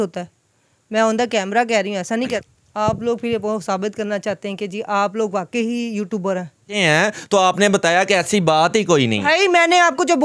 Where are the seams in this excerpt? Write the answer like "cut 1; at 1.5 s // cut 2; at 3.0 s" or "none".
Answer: cut 1; at 2.4 s // cut 2; at 6.8 s